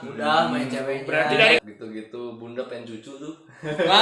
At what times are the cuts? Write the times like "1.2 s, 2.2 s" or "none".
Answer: 1.6 s